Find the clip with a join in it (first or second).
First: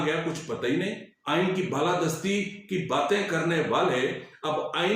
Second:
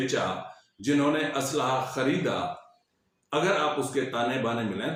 first